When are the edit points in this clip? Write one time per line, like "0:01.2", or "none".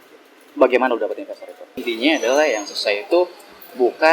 0:01.7